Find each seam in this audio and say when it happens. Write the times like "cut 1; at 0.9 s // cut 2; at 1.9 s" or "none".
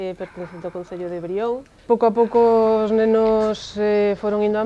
cut 1; at 1.7 s